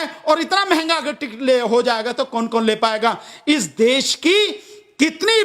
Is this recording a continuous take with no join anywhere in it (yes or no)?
yes